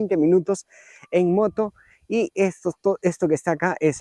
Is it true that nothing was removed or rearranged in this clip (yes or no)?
yes